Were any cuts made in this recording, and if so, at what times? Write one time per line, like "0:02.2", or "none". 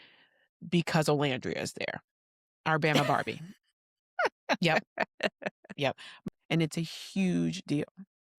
0:06.1